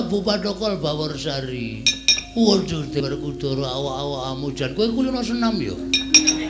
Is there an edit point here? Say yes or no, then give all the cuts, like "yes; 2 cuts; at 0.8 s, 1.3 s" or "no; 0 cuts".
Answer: yes; 1 cut; at 3.0 s